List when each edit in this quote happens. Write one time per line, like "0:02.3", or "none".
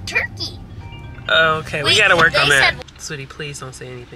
0:02.8